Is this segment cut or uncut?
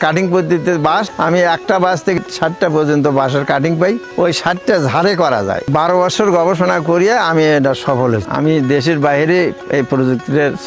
cut